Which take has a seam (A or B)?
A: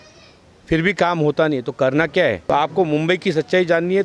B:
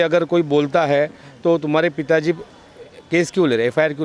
A